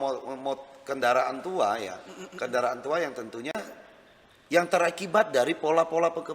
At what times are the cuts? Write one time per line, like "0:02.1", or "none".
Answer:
0:03.5